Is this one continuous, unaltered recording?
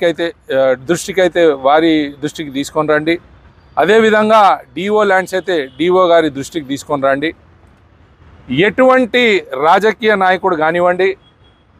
yes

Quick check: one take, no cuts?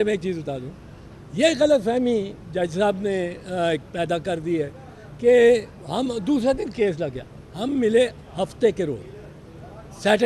yes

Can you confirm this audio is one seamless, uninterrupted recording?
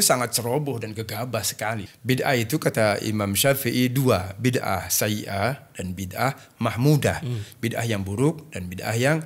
no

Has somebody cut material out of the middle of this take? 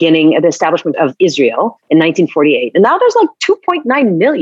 yes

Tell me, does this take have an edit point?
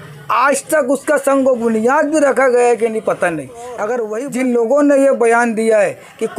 yes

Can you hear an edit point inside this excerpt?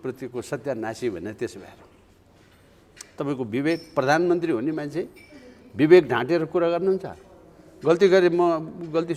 no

